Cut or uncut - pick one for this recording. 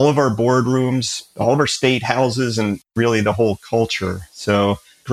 uncut